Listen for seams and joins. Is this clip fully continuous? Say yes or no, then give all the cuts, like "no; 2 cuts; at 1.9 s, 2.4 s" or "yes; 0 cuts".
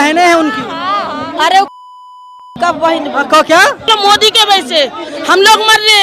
no; 1 cut; at 3.9 s